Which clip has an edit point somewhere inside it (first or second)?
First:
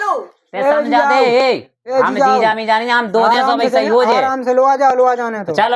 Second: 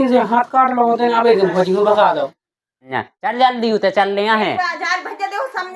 second